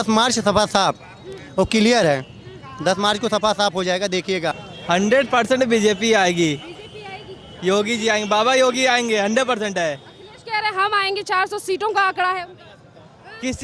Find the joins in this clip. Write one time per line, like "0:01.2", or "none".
0:04.7